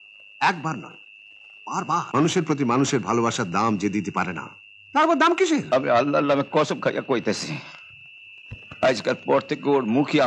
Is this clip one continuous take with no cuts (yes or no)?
no